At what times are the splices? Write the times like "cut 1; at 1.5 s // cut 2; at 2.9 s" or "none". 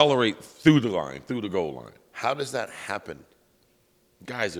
none